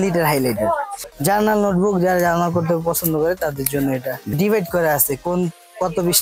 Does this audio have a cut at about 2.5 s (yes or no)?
no